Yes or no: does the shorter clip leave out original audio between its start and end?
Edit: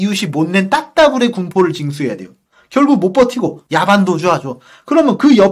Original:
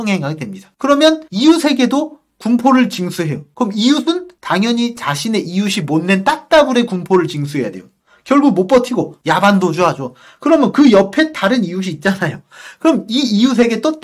no